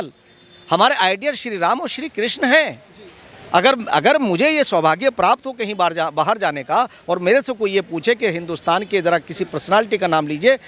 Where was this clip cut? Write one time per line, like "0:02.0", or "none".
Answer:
none